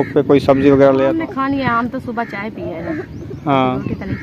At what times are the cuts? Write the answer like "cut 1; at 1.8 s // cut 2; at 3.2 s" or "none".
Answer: none